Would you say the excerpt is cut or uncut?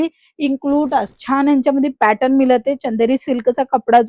cut